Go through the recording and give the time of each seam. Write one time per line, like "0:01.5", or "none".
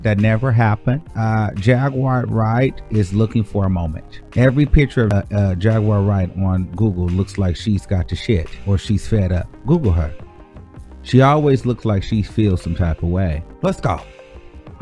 0:01.1
0:05.1
0:13.4